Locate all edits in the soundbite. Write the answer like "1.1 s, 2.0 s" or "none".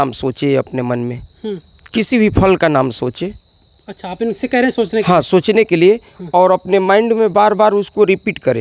none